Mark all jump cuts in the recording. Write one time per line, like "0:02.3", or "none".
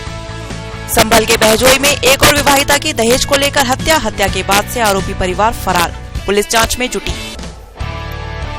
0:00.9